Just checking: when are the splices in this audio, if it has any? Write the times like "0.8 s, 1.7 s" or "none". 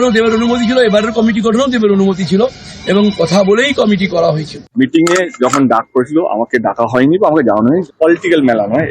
4.7 s, 7.9 s